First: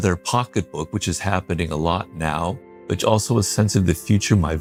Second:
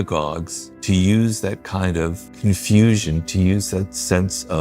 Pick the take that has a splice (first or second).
second